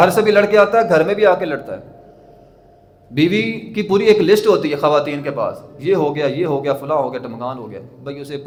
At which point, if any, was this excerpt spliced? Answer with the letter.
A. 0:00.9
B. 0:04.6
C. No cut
C